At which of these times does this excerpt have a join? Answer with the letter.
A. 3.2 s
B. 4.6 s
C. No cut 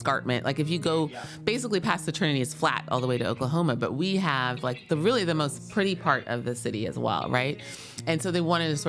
C